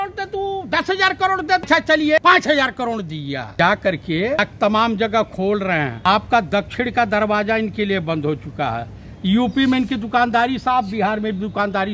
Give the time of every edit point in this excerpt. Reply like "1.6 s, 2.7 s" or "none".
1.6 s, 3.5 s, 4.4 s, 5.9 s